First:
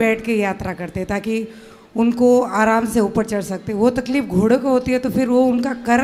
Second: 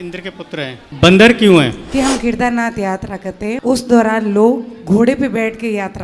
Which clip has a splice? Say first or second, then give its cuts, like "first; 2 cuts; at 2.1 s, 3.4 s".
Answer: second; 3 cuts; at 0.9 s, 1.8 s, 3.6 s